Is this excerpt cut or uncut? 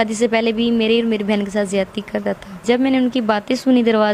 cut